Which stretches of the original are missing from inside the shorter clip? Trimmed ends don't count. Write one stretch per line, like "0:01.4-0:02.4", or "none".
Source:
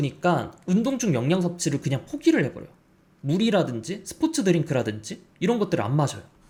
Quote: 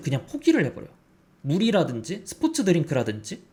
none